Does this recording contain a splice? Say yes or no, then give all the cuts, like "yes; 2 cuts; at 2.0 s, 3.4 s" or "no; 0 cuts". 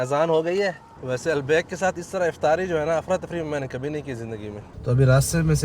yes; 2 cuts; at 0.9 s, 4.7 s